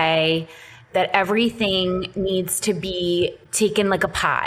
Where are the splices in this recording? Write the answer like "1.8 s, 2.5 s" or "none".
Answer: 3.4 s